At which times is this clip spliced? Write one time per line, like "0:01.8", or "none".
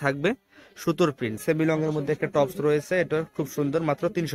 0:01.4